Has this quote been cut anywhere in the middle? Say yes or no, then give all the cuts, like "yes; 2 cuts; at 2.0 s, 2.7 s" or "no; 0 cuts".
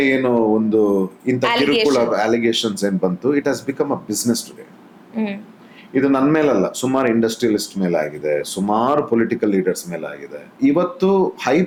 no; 0 cuts